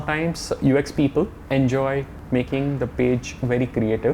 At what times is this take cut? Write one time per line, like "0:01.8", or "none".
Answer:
0:01.4
0:02.1